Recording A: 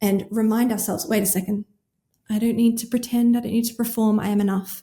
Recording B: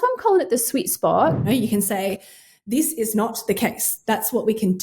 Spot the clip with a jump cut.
B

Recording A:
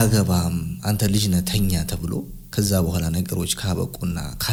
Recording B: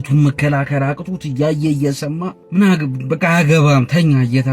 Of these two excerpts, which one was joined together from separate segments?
B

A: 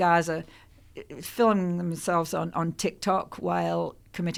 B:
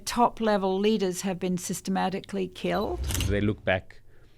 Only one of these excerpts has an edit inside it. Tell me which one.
B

